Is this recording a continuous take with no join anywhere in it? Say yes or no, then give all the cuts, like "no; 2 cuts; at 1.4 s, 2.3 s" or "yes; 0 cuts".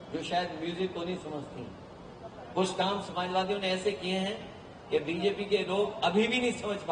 yes; 0 cuts